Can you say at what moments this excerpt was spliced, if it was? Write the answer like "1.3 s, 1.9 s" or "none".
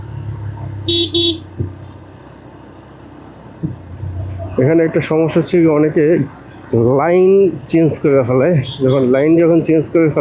none